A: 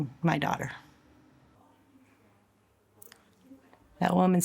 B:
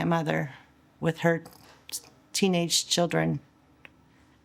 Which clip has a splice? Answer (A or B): A